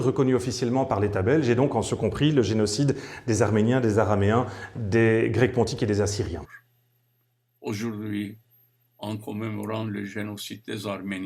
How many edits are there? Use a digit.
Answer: 1